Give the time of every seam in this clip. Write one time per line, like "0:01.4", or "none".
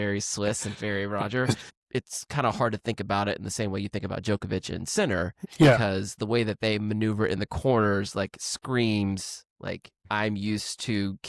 0:01.7
0:05.4
0:10.0